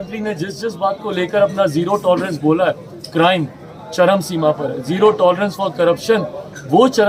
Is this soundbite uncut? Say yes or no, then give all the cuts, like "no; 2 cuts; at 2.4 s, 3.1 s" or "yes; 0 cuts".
yes; 0 cuts